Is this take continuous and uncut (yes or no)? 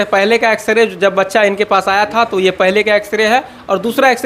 yes